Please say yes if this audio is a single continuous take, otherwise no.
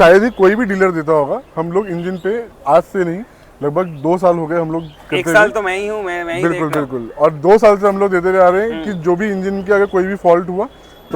yes